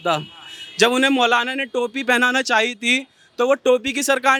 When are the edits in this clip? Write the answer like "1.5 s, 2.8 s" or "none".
none